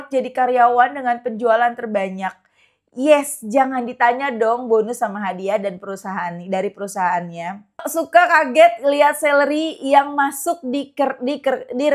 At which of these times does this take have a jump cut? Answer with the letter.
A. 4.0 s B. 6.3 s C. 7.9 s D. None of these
C